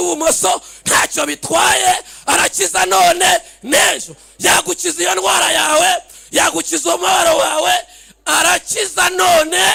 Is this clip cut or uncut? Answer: uncut